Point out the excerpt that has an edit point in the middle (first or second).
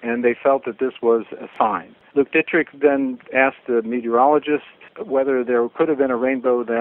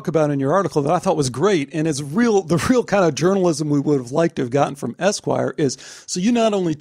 first